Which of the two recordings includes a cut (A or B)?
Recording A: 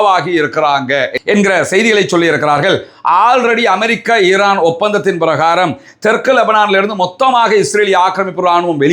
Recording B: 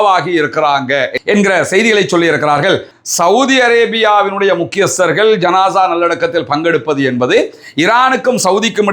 B